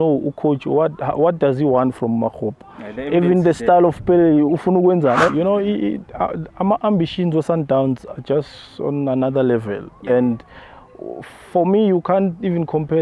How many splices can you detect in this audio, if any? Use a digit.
1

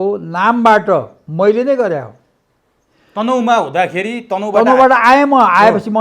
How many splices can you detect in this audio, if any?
0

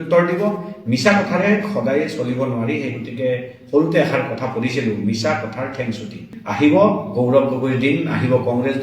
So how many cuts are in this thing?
1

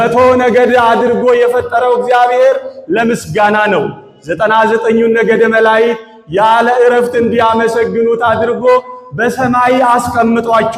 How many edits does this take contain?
0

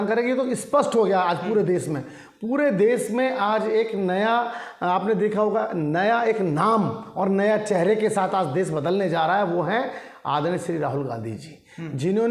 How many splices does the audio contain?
0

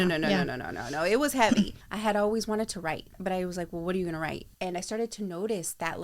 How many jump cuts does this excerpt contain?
3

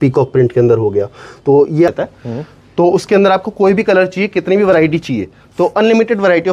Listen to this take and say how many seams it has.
1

